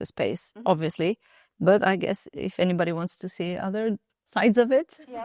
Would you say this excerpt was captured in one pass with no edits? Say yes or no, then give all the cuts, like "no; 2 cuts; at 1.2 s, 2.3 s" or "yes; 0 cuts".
yes; 0 cuts